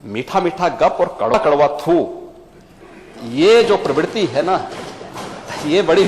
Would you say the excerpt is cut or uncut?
cut